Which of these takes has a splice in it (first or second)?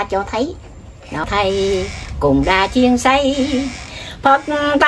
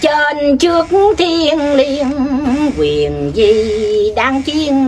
first